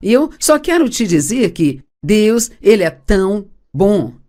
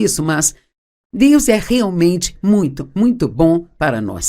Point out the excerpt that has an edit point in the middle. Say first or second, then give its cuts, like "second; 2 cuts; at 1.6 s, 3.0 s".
second; 1 cut; at 1.6 s